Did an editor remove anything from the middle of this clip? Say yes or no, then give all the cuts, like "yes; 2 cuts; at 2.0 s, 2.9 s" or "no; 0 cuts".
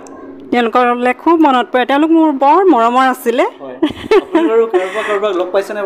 no; 0 cuts